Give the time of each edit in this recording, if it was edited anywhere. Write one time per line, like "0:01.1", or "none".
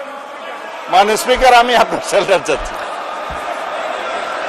none